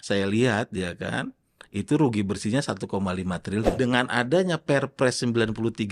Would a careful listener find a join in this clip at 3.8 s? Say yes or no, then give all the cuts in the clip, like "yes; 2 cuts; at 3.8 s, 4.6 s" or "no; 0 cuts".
yes; 1 cut; at 3.8 s